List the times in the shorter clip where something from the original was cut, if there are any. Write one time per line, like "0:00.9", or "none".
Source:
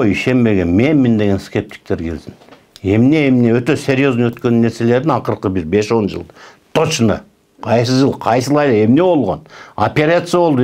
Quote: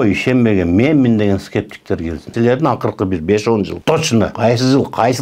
0:02.3
0:04.1